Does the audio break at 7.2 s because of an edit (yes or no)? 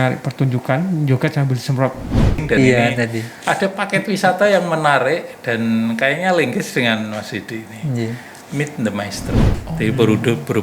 no